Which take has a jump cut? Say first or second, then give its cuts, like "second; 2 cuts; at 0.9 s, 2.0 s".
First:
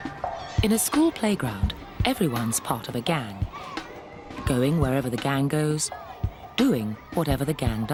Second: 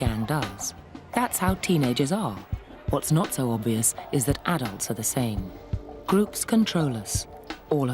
second; 1 cut; at 1.3 s